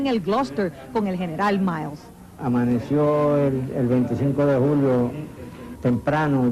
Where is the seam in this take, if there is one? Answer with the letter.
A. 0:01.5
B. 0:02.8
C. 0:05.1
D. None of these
B